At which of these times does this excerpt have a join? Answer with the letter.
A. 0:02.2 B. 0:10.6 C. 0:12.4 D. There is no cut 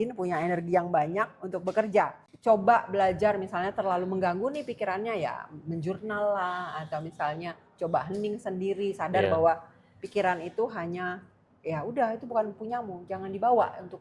A